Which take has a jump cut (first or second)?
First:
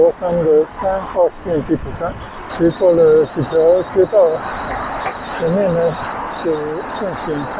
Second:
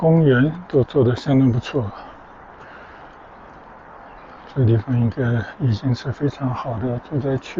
first